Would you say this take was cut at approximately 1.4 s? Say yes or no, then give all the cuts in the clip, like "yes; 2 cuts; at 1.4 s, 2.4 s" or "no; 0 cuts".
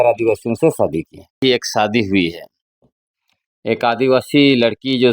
yes; 1 cut; at 1.4 s